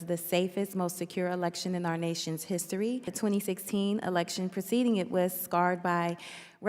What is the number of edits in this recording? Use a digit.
1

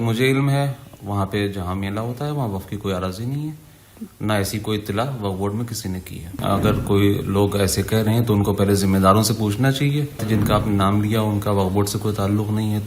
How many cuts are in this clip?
2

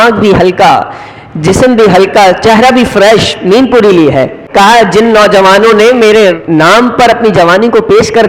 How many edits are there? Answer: 2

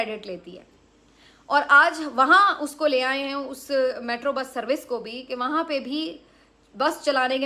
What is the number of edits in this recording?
0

